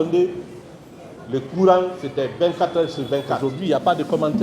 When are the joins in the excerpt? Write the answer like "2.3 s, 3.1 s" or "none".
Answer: 3.5 s